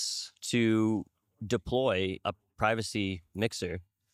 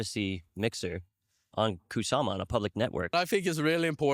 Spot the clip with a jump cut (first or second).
second